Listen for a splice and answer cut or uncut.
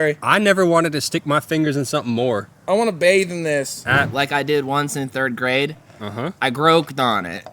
cut